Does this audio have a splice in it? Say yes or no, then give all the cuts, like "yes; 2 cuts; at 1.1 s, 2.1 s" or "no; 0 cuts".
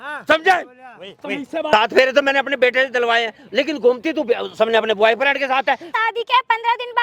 yes; 2 cuts; at 1.7 s, 5.9 s